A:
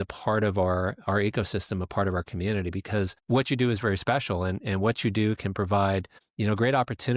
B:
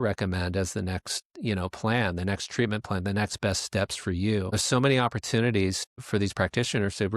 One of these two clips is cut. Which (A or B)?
B